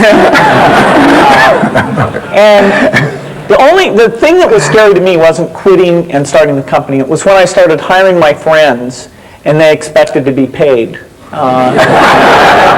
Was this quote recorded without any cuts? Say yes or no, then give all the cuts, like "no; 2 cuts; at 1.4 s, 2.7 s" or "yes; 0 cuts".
yes; 0 cuts